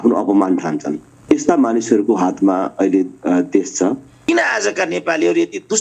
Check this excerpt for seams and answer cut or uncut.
cut